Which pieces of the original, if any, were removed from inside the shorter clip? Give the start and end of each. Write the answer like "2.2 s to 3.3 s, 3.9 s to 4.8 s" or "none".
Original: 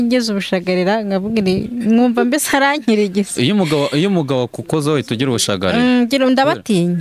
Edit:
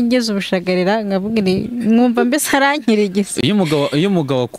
none